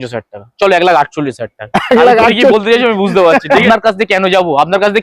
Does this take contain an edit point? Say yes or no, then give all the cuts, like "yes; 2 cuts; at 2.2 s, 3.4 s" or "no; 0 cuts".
yes; 1 cut; at 3.6 s